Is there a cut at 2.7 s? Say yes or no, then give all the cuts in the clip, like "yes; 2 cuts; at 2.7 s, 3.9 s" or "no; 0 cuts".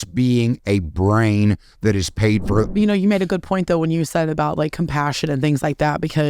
yes; 1 cut; at 2.7 s